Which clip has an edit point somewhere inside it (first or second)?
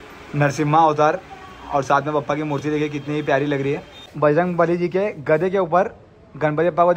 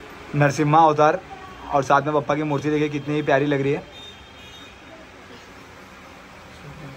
first